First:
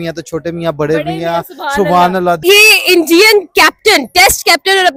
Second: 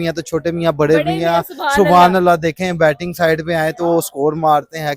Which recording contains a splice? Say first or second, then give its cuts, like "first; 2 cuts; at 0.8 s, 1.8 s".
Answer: second; 1 cut; at 2.4 s